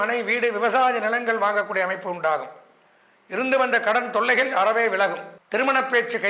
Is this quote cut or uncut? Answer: cut